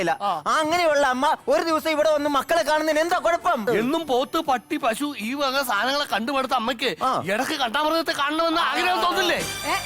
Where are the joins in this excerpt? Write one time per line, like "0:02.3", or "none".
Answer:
0:03.6